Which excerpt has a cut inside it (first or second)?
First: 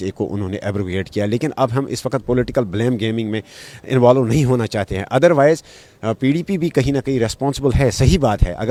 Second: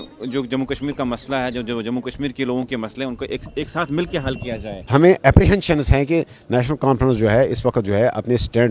second